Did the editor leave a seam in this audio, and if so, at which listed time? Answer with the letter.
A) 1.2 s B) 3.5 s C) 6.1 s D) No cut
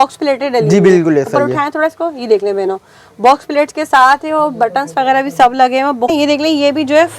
C